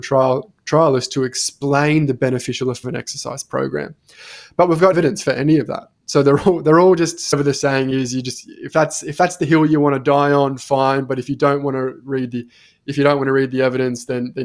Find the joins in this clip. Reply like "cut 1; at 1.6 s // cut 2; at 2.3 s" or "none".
cut 1; at 4.9 s // cut 2; at 7.3 s